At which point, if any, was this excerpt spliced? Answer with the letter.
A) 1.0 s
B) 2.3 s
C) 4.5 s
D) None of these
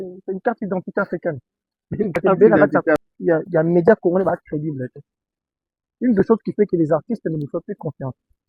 B